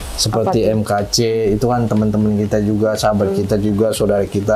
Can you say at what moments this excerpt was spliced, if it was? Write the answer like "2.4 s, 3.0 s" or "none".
none